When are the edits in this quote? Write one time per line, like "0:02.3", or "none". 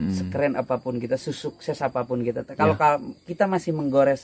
none